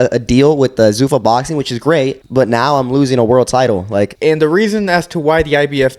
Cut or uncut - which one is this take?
cut